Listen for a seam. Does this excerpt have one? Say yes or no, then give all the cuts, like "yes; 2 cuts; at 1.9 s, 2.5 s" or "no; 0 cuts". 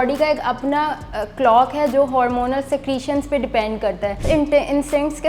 yes; 1 cut; at 4.2 s